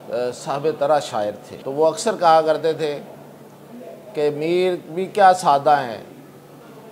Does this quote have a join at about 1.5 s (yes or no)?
yes